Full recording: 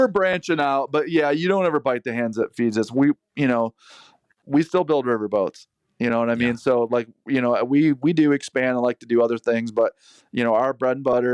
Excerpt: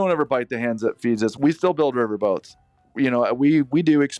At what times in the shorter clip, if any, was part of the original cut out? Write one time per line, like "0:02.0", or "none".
0:01.3
0:02.8